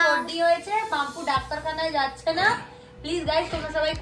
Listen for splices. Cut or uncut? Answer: uncut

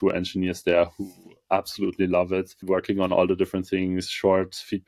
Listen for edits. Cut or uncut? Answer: cut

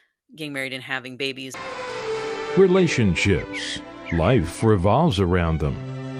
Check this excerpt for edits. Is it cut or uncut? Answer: cut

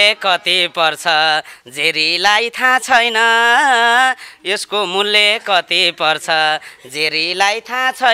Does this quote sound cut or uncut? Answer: uncut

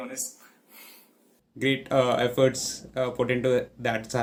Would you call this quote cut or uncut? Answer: uncut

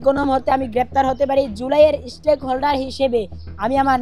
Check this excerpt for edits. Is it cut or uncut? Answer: uncut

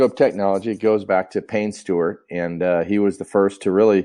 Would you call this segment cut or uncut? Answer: cut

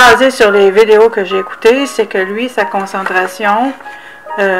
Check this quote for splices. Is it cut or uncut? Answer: cut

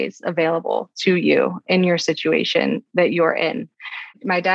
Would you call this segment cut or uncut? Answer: uncut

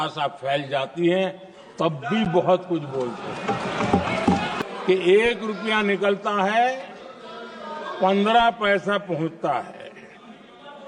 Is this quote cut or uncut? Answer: cut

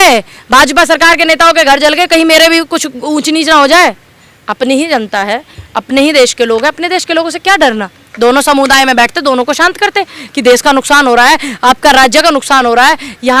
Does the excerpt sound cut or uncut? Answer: uncut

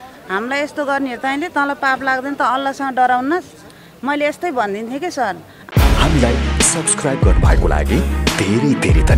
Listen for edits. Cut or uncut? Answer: cut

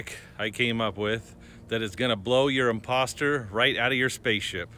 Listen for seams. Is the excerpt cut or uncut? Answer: uncut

